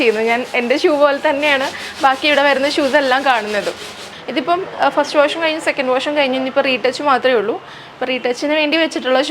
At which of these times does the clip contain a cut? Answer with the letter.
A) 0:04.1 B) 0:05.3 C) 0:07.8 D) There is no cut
A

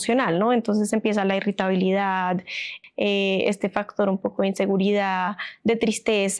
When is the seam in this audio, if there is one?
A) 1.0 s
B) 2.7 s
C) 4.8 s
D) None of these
B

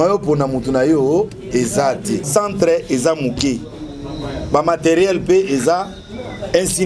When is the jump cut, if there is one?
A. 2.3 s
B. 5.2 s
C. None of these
A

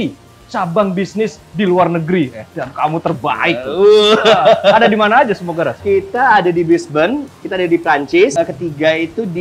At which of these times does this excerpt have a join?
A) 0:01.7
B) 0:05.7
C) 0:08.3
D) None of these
C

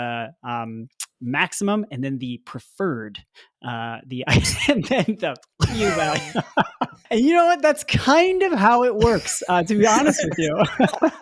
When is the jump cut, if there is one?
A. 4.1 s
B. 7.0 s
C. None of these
B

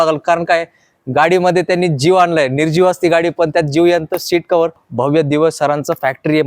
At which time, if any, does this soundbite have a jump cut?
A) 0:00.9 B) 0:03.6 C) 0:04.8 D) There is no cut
C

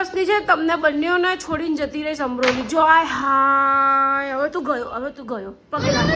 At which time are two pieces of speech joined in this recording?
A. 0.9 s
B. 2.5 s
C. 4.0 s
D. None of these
D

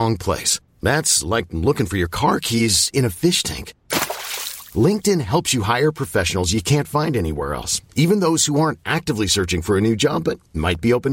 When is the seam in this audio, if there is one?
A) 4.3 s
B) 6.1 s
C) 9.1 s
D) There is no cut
D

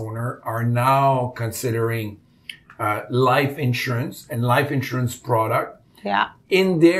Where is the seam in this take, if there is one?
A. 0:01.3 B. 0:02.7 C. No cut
C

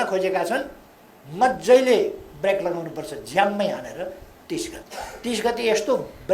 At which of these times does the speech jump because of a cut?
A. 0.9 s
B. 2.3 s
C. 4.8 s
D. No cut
C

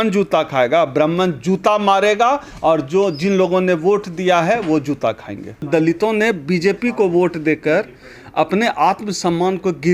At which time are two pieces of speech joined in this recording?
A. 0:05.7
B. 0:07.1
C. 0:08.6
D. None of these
A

